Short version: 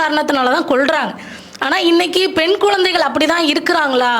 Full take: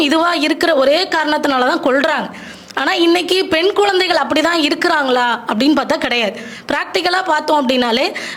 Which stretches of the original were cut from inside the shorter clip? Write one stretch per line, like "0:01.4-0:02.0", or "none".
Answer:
none

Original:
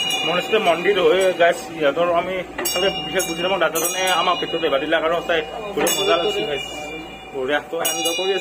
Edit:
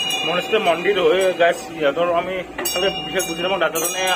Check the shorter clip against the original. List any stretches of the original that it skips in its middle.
none

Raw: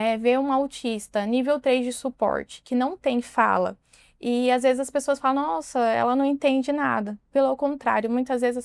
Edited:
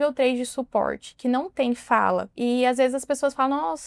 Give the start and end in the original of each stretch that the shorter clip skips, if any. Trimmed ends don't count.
0:03.8-0:04.2

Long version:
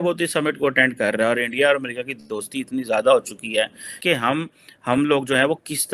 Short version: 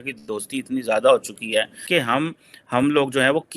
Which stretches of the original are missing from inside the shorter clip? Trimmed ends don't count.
0:03.8-0:03.9

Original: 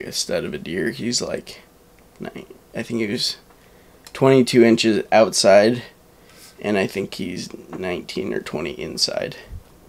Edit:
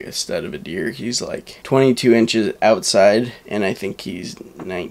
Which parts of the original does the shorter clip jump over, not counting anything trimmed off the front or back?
0:01.5-0:04.0
0:05.9-0:06.5

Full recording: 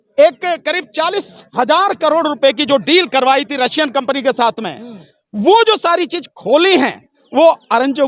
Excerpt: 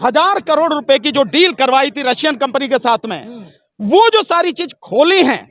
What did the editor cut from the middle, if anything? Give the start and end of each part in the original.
none

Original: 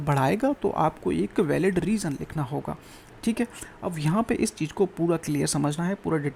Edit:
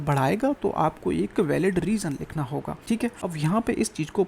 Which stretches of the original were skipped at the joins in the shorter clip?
0:03.0-0:03.6

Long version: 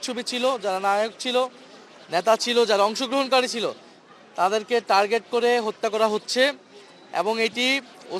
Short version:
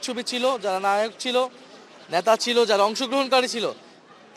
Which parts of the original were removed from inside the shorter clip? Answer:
none

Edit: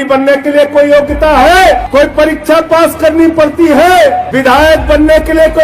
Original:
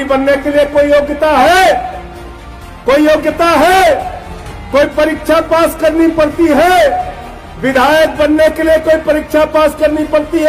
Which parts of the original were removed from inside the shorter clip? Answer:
0:01.8-0:04.6
0:07.1-0:07.6

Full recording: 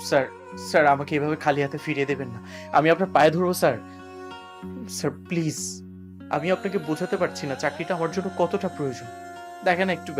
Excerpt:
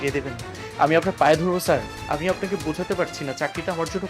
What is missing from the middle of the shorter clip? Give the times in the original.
0:03.9-0:06.2

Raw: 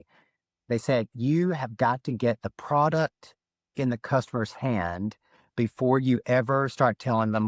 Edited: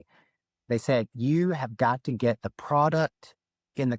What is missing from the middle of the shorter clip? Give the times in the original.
none

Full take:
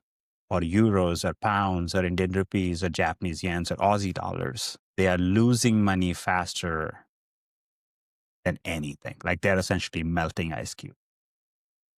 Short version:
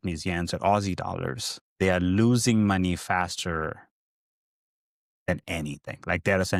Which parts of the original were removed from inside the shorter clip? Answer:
none

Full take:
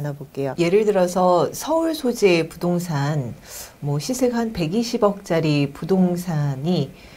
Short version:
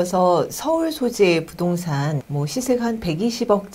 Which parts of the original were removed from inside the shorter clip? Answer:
0:03.3-0:03.8

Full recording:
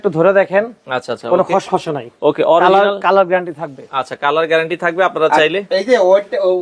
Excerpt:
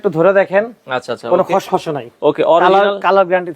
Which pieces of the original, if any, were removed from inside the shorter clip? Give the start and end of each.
none

